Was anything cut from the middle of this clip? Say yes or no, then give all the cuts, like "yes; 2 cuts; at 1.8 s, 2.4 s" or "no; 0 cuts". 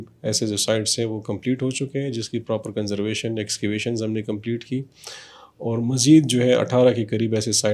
no; 0 cuts